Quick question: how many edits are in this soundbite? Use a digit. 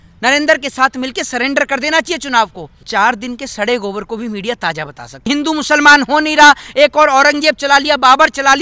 2